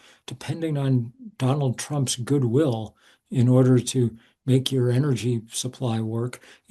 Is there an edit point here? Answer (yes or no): no